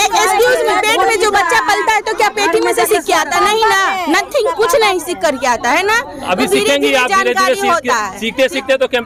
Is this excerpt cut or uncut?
uncut